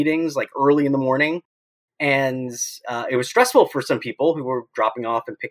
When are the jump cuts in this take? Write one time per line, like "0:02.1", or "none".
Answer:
none

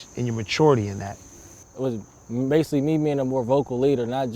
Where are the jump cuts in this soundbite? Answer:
0:01.6

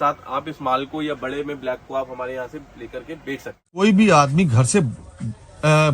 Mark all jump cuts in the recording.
0:03.8

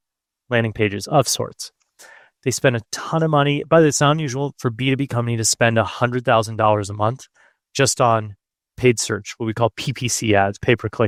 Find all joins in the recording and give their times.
none

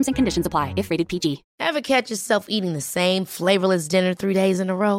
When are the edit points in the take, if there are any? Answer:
0:01.5

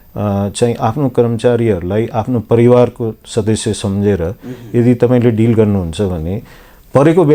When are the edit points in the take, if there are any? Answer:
none

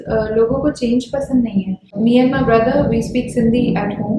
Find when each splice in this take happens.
0:01.9

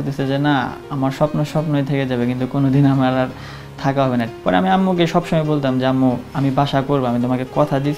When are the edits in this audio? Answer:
0:04.3

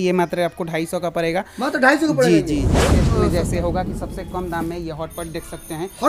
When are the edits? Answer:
0:03.0

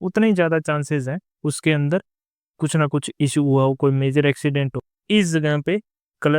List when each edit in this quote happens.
0:04.9

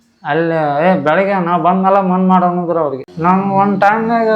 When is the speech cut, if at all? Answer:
0:03.0

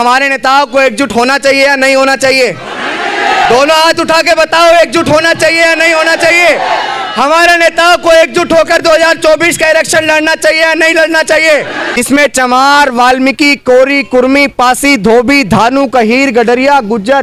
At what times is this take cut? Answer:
0:11.9

